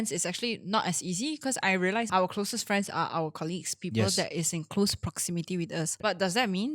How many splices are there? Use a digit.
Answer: 2